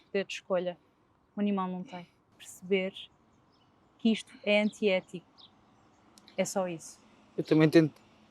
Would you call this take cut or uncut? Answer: cut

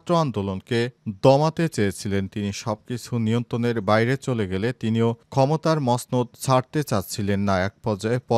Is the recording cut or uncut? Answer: uncut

